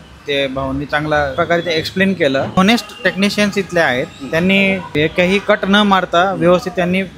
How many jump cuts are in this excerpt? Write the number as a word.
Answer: three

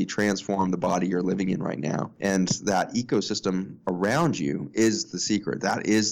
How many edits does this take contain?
zero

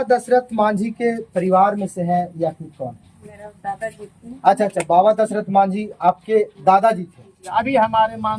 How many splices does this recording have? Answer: one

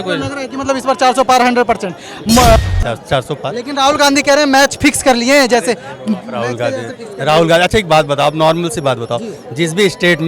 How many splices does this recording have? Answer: one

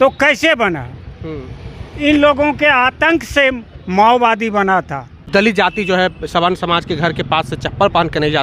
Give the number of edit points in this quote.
one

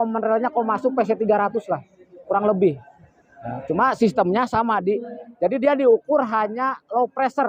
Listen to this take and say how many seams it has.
zero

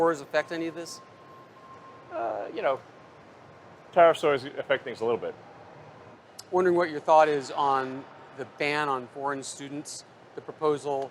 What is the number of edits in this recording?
one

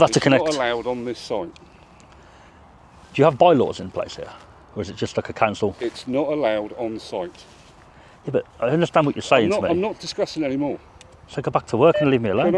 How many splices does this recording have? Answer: zero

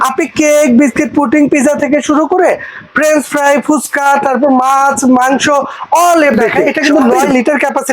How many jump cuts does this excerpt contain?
one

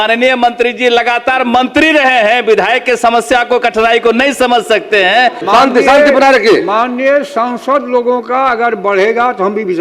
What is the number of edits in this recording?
one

